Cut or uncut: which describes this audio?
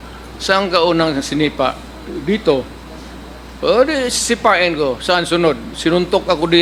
uncut